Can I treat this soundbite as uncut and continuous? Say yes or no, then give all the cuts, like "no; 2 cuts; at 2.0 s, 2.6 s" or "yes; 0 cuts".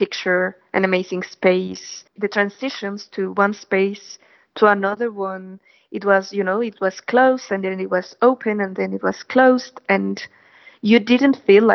no; 1 cut; at 2.0 s